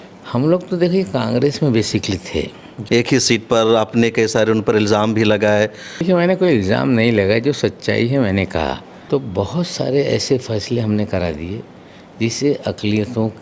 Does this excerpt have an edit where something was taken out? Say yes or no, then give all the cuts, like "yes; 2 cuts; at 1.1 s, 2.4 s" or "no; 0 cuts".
yes; 3 cuts; at 2.7 s, 5.9 s, 8.9 s